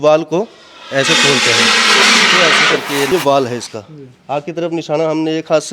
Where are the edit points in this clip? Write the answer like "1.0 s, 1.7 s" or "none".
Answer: 3.1 s